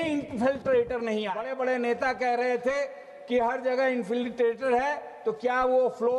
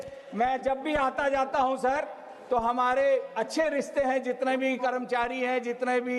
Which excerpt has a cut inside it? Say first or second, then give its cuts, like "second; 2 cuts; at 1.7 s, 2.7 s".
first; 1 cut; at 1.4 s